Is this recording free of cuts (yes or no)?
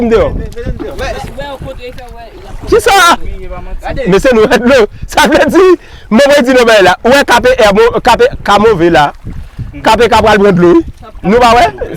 yes